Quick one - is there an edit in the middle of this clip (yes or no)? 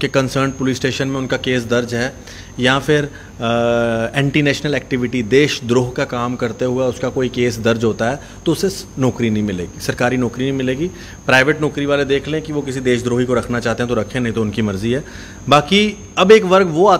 no